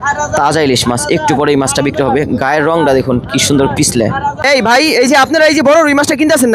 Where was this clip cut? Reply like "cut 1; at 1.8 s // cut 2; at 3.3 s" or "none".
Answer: cut 1; at 4.4 s